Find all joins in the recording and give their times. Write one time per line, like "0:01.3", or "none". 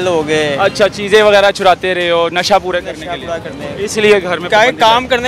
none